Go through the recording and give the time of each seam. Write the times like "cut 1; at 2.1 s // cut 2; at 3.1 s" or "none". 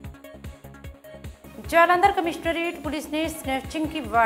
cut 1; at 1.6 s

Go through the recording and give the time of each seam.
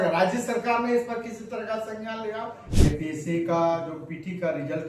cut 1; at 2.7 s

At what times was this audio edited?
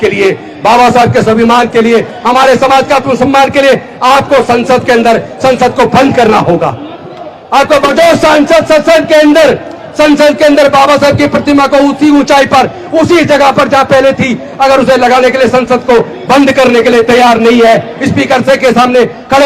cut 1; at 7.9 s

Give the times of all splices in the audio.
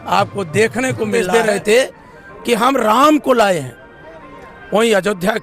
cut 1; at 1.1 s

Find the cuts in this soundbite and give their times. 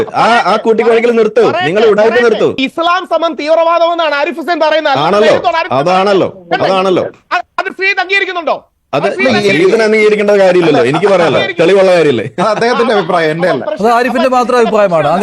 cut 1; at 2.6 s

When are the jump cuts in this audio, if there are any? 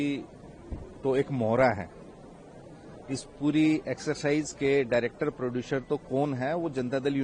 none

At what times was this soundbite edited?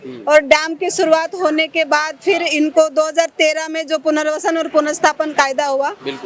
none

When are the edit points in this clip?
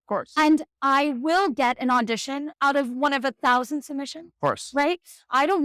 cut 1; at 2.5 s

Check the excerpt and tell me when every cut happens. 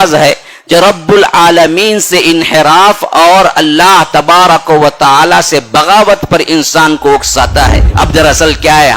cut 1; at 7.8 s

